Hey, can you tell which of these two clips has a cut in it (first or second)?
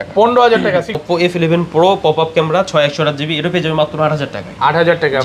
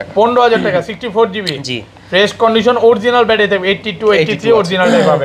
first